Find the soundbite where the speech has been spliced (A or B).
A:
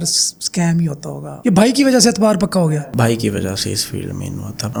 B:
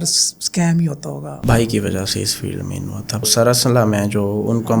B